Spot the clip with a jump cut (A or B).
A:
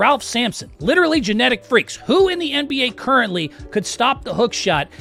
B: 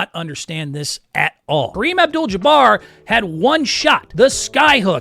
B